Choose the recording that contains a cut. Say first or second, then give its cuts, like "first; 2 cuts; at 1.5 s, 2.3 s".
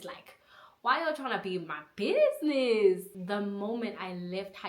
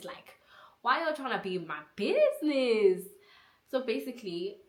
first; 1 cut; at 3.1 s